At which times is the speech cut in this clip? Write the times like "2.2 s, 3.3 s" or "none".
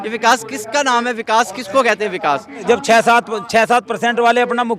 2.6 s